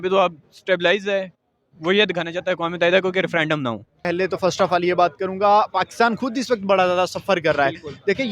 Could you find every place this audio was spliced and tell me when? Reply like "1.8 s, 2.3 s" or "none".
4.0 s